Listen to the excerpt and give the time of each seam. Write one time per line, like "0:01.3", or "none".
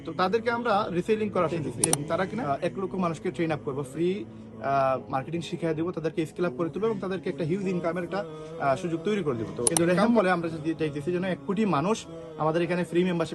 0:02.4
0:09.7